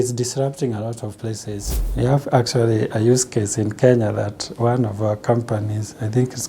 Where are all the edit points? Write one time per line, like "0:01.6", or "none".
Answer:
0:01.7